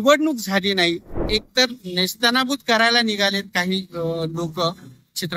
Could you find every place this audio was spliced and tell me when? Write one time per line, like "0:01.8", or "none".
0:01.2